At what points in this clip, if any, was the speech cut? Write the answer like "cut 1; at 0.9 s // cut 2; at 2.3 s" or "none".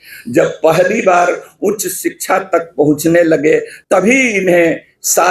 cut 1; at 3.7 s